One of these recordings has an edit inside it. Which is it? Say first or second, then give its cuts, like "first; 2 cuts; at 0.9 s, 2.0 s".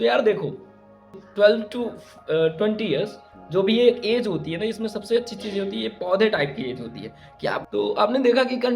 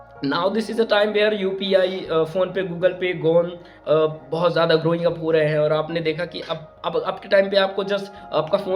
first; 2 cuts; at 1.2 s, 7.6 s